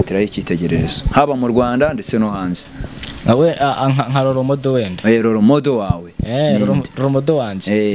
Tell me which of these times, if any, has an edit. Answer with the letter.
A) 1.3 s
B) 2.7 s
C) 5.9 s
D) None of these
D